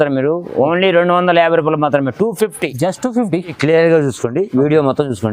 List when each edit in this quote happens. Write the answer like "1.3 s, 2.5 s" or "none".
3.6 s